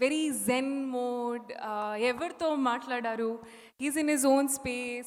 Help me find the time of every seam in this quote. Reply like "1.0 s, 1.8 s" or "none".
none